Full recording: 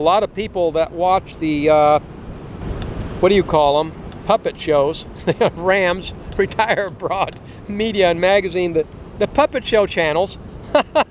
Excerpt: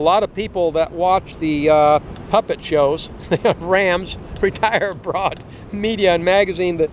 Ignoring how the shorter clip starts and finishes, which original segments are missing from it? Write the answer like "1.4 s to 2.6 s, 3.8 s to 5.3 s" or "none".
2.2 s to 4.1 s